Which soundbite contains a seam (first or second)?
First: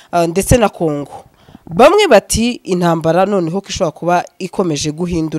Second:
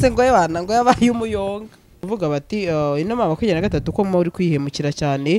second